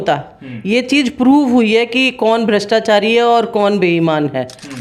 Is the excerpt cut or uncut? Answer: uncut